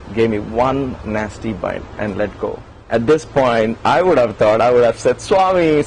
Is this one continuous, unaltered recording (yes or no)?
no